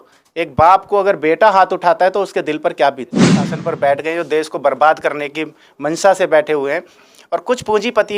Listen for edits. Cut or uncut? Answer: cut